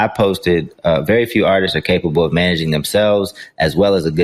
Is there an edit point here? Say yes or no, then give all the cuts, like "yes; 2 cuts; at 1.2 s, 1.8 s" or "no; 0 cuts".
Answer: no; 0 cuts